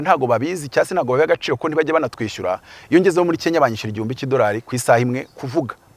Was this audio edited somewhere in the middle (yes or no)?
no